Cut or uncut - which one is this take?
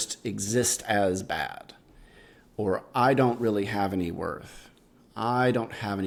uncut